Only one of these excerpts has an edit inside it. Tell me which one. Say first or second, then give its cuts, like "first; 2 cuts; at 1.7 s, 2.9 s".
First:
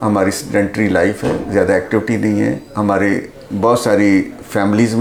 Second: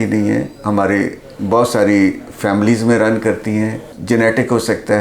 second; 1 cut; at 3.9 s